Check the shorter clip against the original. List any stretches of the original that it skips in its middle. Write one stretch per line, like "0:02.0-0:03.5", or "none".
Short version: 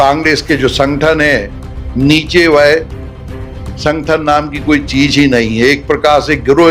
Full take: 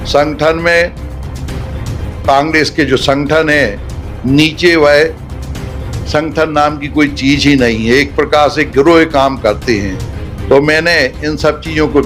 none